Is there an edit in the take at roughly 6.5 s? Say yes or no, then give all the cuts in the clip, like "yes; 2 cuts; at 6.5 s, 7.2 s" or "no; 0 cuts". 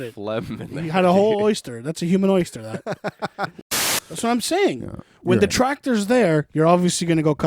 no; 1 cut; at 3.5 s